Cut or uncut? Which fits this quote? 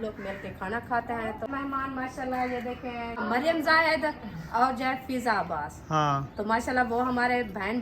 uncut